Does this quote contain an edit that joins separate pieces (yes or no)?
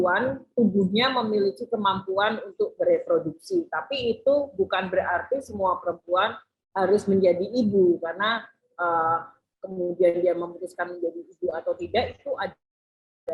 no